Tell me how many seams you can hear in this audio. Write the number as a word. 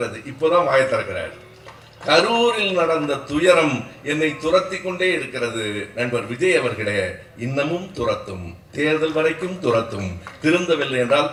zero